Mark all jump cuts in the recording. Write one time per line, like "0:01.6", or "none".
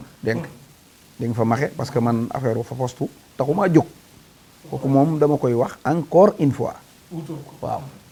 none